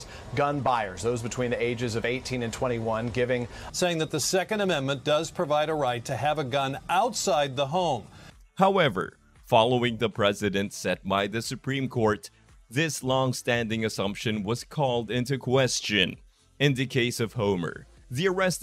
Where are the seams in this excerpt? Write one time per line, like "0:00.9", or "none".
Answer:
none